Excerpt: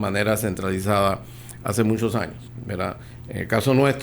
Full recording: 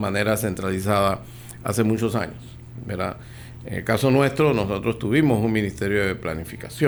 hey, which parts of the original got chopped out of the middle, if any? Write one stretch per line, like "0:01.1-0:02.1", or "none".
0:02.8-0:03.2